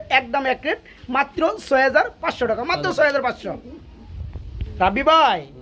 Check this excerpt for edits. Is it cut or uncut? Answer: uncut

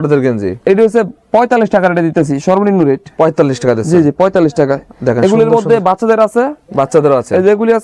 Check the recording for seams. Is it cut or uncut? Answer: uncut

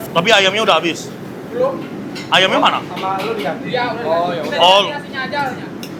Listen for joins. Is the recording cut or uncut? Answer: uncut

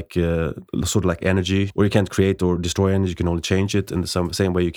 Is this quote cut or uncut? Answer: uncut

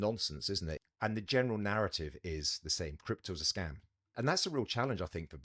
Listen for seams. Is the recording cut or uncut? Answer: cut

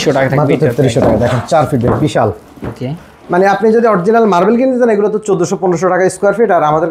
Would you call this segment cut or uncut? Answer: uncut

